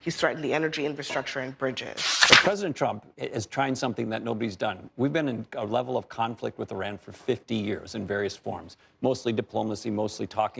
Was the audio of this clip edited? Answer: yes; 1 cut; at 2.1 s

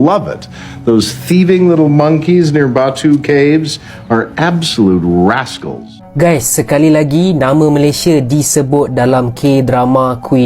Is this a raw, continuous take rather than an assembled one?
no; 1 cut; at 6.0 s

